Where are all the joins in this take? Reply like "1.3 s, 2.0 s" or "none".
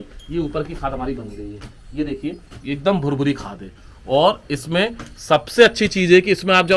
none